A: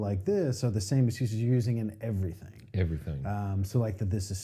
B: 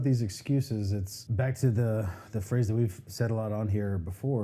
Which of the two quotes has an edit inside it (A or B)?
B